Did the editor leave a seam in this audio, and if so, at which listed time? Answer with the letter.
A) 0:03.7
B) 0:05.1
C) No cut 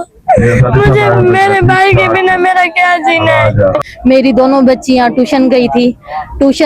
A